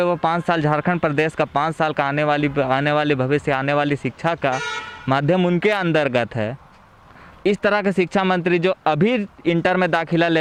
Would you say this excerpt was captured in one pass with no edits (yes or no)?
yes